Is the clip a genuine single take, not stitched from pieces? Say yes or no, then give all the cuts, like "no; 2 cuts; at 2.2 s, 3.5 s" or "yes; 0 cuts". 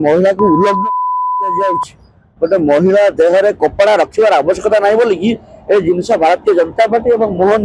yes; 0 cuts